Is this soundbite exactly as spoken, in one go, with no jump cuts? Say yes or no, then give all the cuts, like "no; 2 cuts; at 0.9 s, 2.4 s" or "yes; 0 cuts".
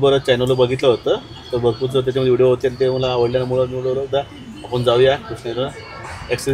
yes; 0 cuts